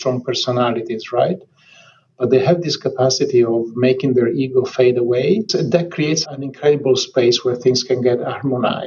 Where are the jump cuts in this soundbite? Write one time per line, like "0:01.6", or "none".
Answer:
0:06.2